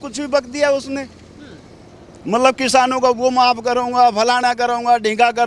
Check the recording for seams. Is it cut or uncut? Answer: uncut